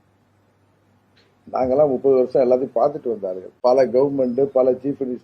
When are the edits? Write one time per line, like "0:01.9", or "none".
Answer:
none